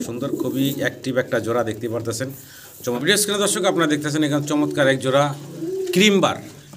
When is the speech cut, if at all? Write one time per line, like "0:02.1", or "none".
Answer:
0:03.0